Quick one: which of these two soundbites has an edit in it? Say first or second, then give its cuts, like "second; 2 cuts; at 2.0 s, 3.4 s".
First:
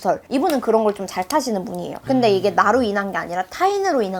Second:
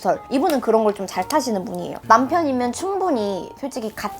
second; 1 cut; at 2.0 s